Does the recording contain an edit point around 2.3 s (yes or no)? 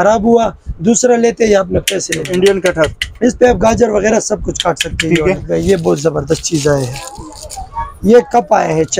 yes